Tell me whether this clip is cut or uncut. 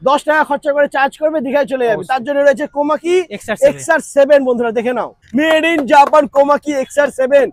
uncut